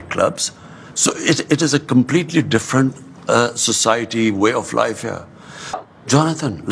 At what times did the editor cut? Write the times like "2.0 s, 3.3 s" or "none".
5.8 s